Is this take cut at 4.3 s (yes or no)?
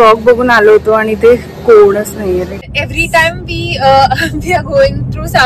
no